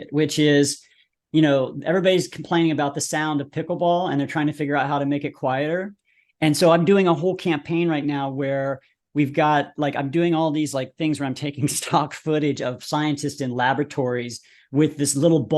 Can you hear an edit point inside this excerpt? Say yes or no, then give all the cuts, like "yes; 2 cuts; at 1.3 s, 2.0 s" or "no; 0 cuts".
no; 0 cuts